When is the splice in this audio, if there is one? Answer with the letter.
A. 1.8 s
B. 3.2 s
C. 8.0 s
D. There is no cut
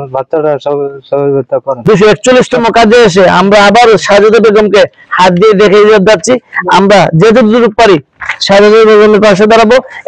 A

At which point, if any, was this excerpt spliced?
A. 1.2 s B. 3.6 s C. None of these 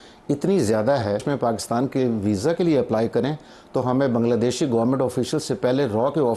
A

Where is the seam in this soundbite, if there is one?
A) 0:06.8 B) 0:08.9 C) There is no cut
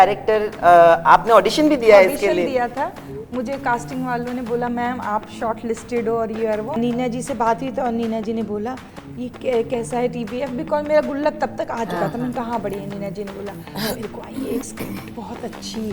A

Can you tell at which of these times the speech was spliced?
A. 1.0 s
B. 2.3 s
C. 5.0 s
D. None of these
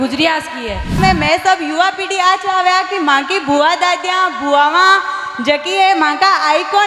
A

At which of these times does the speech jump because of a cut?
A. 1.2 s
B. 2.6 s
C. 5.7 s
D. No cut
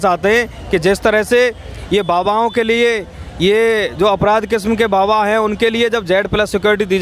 D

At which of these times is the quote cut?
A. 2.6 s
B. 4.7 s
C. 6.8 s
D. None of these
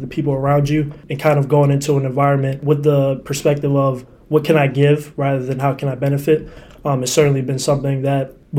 A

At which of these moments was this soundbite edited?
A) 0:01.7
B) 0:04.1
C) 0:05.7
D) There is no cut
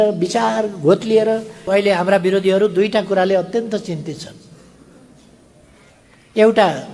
A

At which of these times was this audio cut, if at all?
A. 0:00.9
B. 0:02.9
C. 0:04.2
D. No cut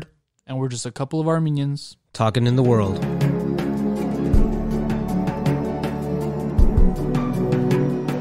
B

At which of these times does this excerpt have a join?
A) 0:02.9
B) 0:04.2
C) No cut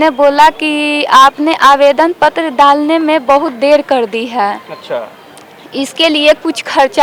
C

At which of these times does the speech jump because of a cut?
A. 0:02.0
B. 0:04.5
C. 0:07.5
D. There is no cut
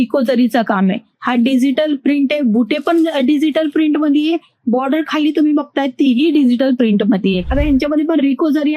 C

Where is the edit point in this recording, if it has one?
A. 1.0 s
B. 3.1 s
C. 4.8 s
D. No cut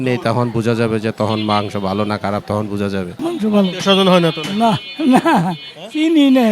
B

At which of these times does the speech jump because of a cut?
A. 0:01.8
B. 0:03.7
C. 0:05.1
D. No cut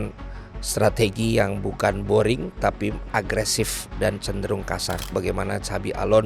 C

